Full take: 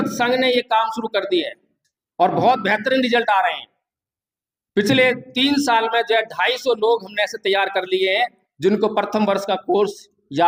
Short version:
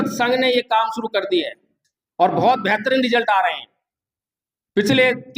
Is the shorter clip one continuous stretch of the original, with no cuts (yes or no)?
yes